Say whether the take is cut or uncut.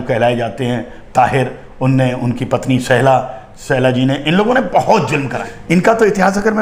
cut